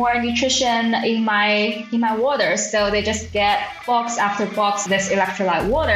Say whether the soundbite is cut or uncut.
cut